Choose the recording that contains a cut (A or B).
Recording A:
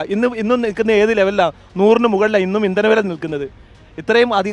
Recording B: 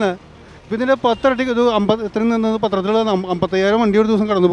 A